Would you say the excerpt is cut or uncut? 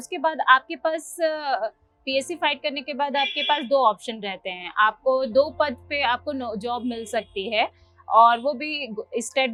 uncut